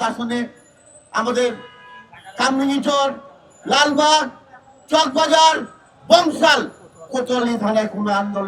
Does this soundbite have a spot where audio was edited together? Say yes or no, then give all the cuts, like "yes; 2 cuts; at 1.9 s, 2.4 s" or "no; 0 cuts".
no; 0 cuts